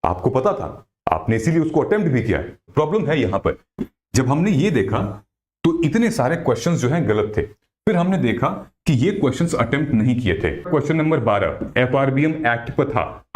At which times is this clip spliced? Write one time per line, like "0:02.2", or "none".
0:02.7
0:10.7